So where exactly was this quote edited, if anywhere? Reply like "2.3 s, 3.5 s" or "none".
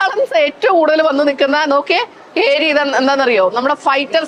none